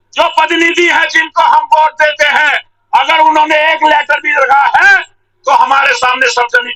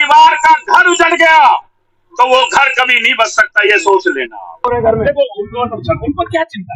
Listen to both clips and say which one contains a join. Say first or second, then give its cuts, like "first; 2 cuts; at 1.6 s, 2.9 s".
second; 1 cut; at 4.6 s